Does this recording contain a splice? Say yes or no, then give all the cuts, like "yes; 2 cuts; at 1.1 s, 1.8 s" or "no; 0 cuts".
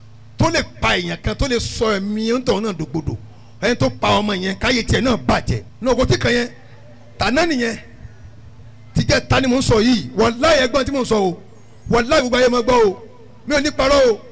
yes; 1 cut; at 5.6 s